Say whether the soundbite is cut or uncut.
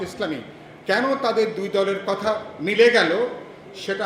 uncut